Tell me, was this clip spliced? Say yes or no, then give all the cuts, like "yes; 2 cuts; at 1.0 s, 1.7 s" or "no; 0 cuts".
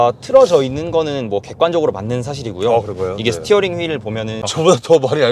yes; 1 cut; at 4.4 s